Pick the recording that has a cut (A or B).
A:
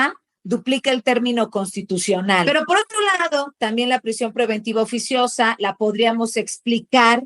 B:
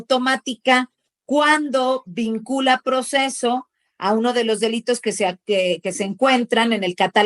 A